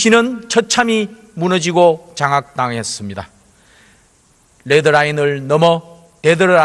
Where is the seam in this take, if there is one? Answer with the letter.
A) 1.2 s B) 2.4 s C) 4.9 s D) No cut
C